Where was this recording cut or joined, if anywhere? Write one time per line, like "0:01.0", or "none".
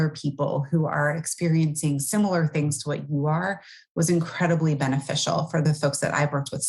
0:05.6

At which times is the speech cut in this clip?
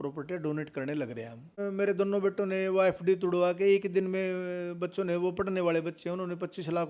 0:01.6

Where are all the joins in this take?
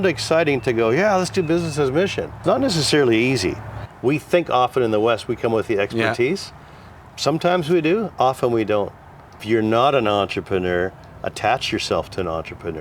0:02.4
0:03.9
0:09.4

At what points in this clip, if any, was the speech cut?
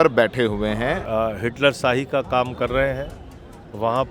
0:01.1

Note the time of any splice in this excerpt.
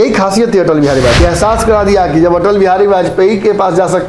0:01.2

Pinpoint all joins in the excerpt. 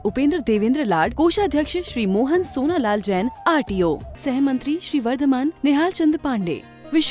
none

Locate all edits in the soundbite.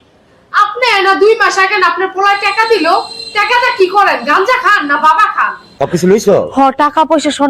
0:05.6

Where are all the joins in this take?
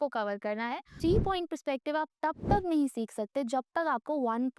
0:00.9

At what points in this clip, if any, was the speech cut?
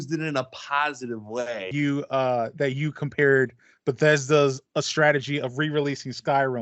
0:01.7

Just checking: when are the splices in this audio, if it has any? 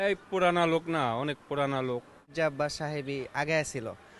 0:02.3

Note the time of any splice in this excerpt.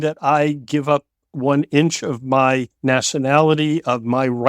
0:02.7

